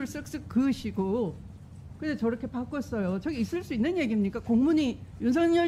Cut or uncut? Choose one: uncut